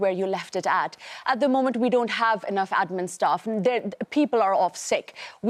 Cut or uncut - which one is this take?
uncut